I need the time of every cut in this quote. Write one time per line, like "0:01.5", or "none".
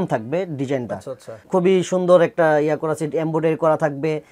0:01.5